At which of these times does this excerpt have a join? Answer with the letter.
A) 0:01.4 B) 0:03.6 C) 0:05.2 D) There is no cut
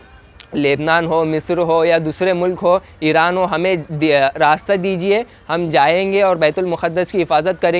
D